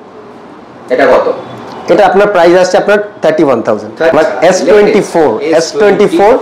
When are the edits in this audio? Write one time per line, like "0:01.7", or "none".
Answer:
0:04.1